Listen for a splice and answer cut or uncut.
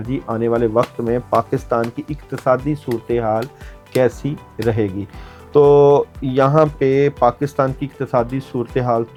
uncut